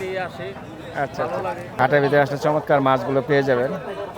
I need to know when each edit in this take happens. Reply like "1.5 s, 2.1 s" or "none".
1.7 s